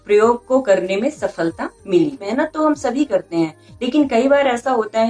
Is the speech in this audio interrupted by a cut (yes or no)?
yes